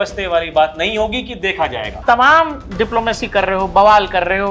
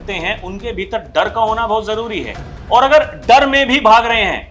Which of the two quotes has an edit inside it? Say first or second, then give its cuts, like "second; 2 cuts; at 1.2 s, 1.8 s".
first; 1 cut; at 2.0 s